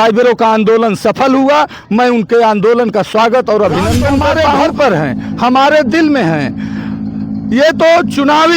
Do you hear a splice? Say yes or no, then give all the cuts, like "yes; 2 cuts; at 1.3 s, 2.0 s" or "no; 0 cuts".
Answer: yes; 1 cut; at 4.7 s